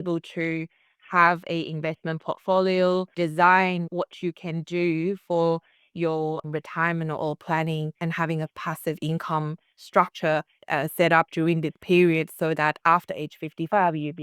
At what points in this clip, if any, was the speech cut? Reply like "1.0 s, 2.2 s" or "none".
3.1 s, 6.4 s